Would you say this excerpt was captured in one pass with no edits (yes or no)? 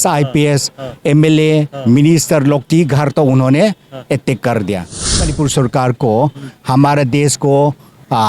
no